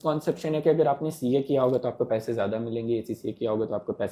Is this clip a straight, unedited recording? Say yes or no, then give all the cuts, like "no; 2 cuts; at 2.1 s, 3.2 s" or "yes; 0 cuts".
yes; 0 cuts